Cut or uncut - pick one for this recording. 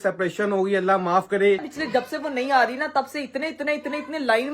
cut